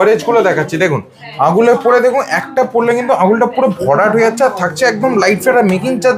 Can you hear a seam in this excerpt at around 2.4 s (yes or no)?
no